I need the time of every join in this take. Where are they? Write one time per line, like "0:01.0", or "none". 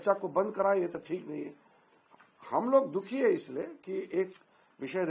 none